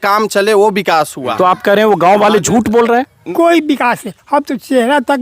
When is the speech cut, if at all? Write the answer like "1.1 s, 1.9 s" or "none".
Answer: 1.2 s, 3.2 s